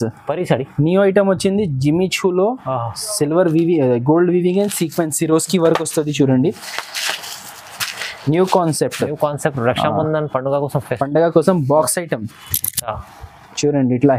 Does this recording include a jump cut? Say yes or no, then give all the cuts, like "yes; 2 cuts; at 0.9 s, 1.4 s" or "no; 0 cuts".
no; 0 cuts